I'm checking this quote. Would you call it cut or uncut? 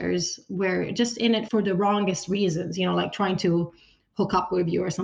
cut